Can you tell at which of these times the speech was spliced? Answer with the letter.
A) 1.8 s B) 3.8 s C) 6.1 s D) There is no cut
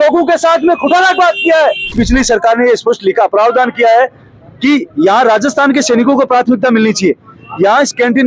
A